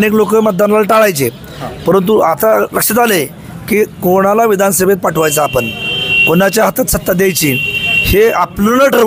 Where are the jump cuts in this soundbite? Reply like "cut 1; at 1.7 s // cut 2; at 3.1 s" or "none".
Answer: none